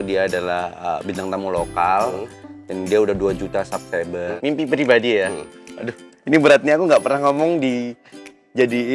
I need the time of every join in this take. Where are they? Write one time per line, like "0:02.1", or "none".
0:04.2